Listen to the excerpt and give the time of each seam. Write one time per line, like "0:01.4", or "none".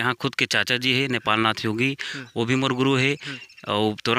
none